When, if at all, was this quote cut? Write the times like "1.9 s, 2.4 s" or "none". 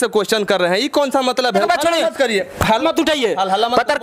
1.6 s, 2.8 s